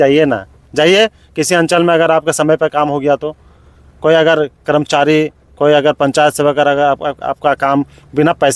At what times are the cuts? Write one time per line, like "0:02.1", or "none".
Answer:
none